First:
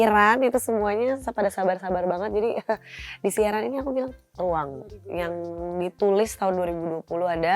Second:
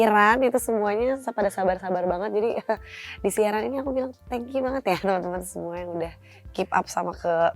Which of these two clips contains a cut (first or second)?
first